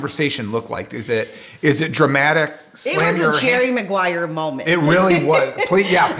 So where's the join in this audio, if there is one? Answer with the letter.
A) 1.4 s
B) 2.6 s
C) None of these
C